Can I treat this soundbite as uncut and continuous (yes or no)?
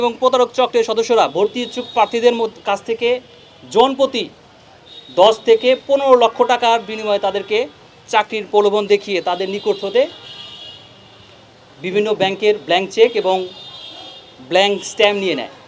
yes